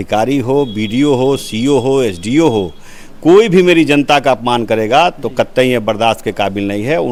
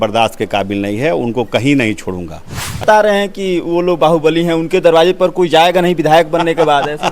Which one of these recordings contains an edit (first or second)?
second